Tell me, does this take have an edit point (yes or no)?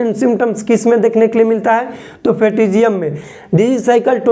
yes